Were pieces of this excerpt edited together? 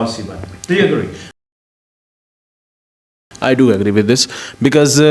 no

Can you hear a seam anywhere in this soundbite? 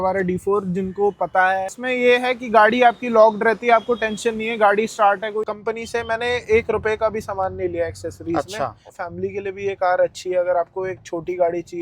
yes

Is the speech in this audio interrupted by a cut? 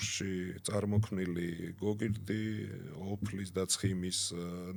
no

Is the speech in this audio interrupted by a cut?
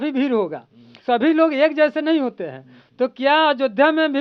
yes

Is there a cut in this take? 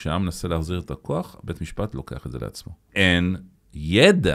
yes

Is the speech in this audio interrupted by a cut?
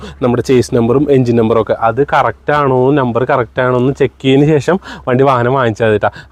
no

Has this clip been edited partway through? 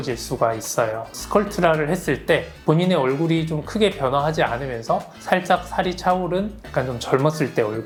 no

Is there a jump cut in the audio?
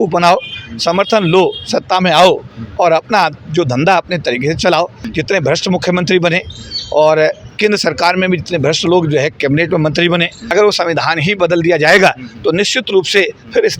yes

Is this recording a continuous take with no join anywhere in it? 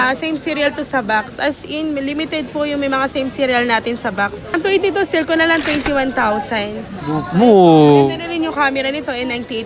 no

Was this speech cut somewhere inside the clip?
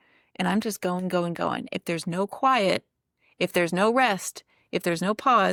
no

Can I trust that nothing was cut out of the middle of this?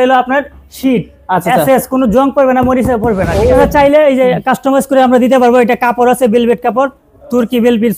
no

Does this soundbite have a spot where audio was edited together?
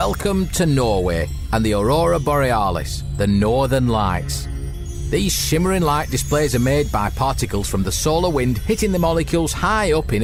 no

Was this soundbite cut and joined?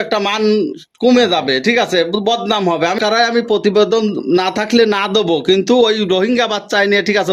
yes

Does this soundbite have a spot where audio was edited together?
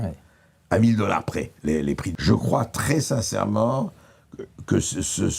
yes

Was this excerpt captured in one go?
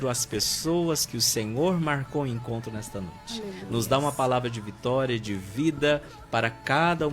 yes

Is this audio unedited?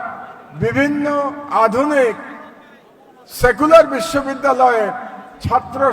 yes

